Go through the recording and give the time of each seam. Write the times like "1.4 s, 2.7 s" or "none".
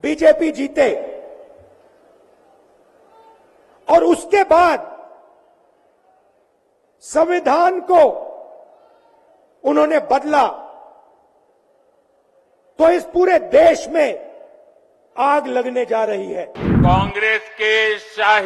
16.6 s